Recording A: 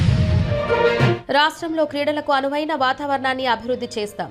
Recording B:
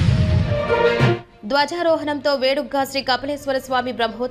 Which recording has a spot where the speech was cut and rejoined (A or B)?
A